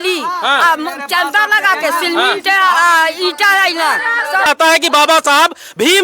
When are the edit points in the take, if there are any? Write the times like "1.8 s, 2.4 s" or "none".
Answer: 4.5 s